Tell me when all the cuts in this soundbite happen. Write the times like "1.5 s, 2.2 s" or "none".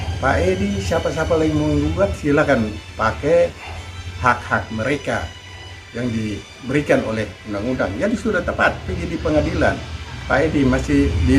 none